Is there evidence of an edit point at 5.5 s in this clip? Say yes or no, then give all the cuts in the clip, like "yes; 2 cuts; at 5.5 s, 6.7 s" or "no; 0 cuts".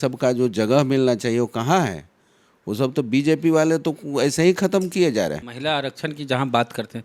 yes; 1 cut; at 5.5 s